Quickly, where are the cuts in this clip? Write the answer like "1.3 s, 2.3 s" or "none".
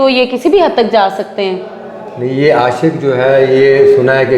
none